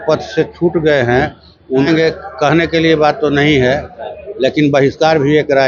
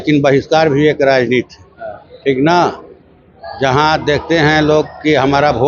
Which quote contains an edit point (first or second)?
first